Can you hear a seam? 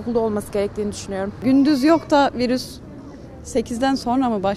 yes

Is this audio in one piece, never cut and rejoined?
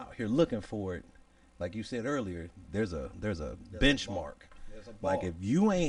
yes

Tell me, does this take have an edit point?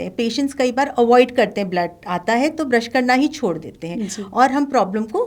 no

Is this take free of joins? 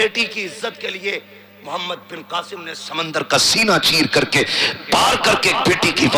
yes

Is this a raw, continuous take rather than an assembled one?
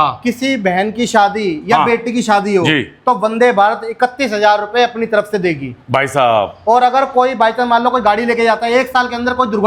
yes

